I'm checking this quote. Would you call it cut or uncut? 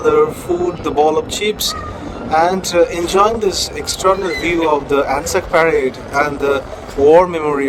uncut